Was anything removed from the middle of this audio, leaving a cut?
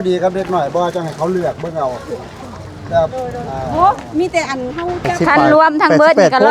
yes; 1 cut; at 5.1 s

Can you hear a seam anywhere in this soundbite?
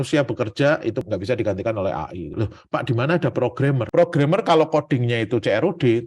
yes; 2 cuts; at 1.0 s, 2.3 s

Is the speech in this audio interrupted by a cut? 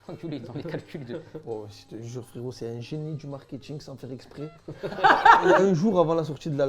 yes; 2 cuts; at 1.4 s, 5.4 s

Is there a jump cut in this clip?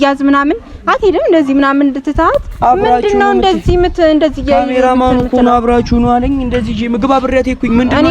no; 0 cuts

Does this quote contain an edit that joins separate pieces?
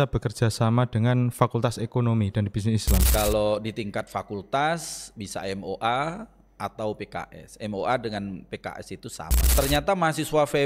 yes; 2 cuts; at 3.1 s, 9.3 s

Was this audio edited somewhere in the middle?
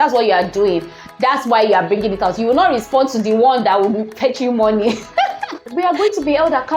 yes; 1 cut; at 5.7 s

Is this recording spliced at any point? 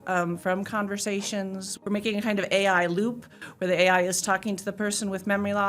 yes; 1 cut; at 1.7 s

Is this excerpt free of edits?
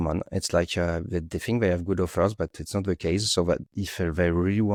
yes; 0 cuts

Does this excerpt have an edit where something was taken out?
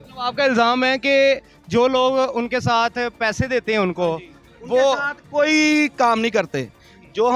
no; 0 cuts

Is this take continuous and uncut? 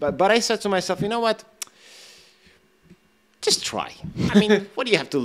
yes; 0 cuts

